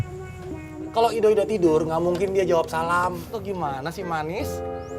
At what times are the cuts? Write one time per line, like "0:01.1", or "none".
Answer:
0:03.2